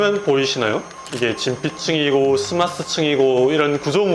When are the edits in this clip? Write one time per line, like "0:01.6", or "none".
0:01.0